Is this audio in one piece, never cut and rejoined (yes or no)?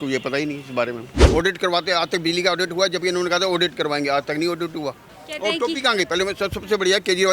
no